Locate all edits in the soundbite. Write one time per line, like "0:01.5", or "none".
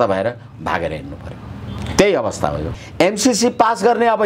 0:02.7